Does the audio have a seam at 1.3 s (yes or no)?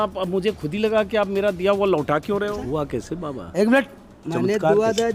no